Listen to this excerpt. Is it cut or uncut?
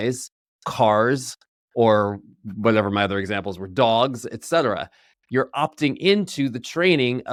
uncut